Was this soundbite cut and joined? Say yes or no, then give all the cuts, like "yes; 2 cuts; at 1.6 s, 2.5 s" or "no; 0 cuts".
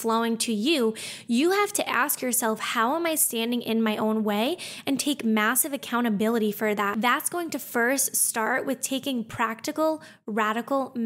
yes; 1 cut; at 6.9 s